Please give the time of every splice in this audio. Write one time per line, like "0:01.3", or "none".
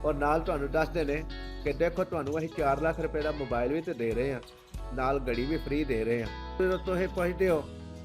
0:06.5